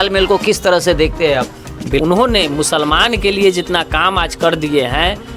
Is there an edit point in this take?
yes; 1 cut; at 2.0 s

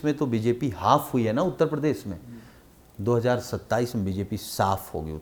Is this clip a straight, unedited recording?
yes; 0 cuts

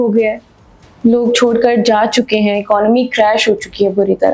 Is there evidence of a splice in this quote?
no; 0 cuts

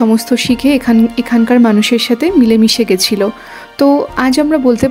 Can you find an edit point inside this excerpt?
no; 0 cuts

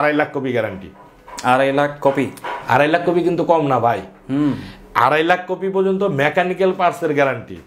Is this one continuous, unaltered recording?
yes; 0 cuts

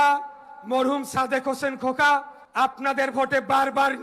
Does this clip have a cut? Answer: yes; 1 cut; at 2.4 s

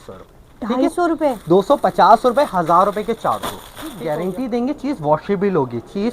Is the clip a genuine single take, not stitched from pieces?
no; 1 cut; at 4.0 s

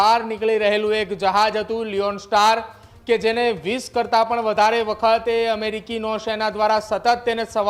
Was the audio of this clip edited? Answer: no; 0 cuts

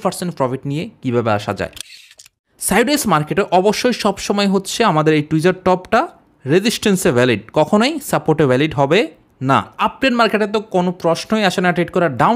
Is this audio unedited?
no; 2 cuts; at 2.1 s, 9.7 s

